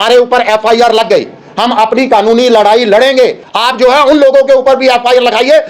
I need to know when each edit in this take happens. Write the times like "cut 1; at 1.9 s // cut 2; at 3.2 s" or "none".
cut 1; at 3.4 s